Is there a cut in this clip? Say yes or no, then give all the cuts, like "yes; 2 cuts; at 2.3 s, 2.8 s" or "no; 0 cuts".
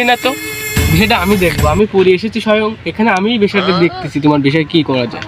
no; 0 cuts